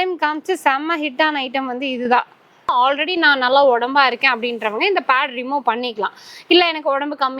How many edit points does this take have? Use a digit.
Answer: 1